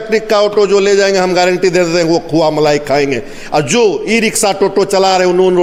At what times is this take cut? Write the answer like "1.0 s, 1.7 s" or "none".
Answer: none